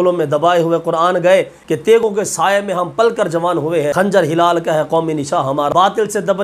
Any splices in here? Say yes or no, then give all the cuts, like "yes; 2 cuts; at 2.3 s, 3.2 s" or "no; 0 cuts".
yes; 3 cuts; at 2.0 s, 3.9 s, 5.7 s